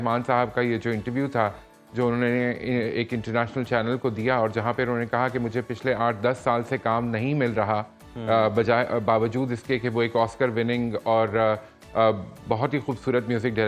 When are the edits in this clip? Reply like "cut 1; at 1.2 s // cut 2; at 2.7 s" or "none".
none